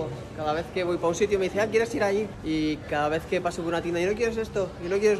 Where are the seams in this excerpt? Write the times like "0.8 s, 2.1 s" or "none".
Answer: 2.4 s